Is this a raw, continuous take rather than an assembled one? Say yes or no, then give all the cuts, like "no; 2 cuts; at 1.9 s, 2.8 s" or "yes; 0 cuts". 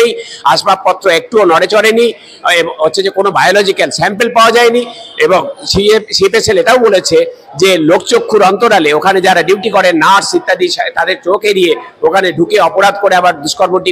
yes; 0 cuts